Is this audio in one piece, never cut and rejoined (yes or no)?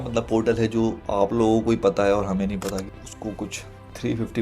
no